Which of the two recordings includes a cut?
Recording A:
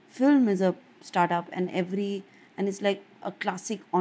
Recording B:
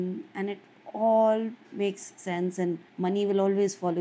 B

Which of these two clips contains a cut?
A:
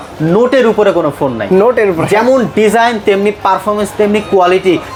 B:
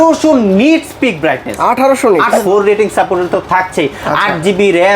B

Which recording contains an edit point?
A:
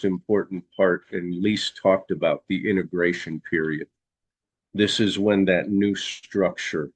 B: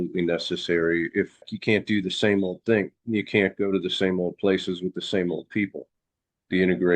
B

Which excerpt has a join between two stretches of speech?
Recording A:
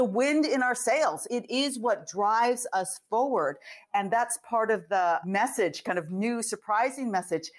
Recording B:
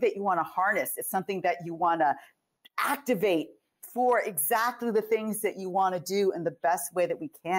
A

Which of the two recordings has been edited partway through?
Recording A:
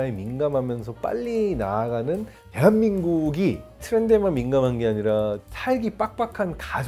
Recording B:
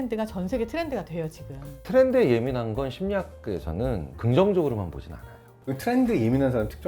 B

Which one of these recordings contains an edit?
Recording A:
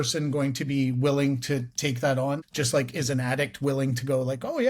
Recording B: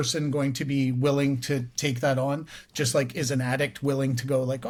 A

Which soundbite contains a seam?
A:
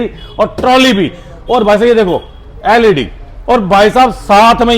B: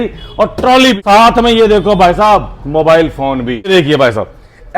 B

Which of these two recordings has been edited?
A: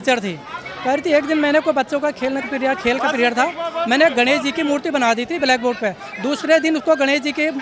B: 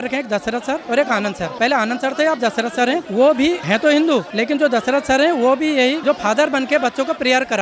B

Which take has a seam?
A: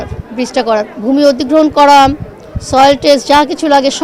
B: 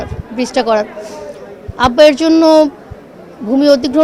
A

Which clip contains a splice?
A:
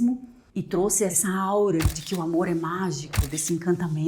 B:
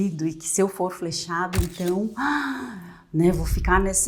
A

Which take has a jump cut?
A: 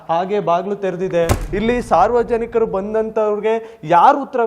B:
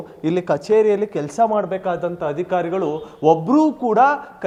A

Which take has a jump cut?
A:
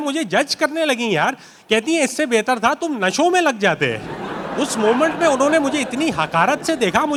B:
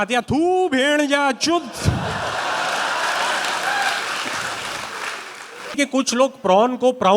B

